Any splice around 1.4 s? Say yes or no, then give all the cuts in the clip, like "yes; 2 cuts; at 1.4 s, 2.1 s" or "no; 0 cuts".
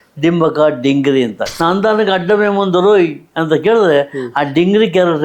yes; 1 cut; at 1.4 s